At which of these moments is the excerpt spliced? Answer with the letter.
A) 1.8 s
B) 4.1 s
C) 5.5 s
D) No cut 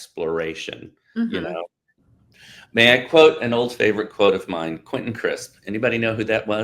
A